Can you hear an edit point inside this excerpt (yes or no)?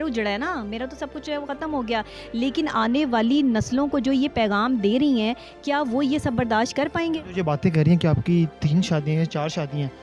no